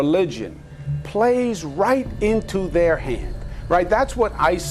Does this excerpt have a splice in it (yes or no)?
yes